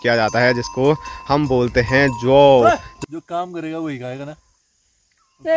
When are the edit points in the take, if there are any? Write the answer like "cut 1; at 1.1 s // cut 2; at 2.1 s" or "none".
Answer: cut 1; at 2.9 s